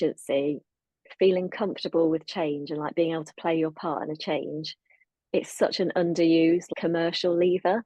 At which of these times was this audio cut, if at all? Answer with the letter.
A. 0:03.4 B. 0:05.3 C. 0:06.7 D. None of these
C